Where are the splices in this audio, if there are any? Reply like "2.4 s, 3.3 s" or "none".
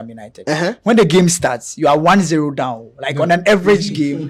none